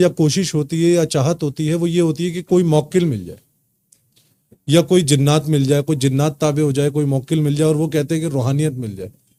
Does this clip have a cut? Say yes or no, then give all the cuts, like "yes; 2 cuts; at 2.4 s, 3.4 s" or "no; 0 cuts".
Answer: no; 0 cuts